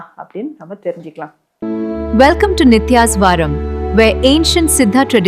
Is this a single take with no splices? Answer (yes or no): no